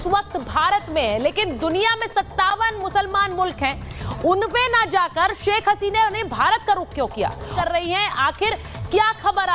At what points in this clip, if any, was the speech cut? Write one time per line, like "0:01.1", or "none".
0:07.5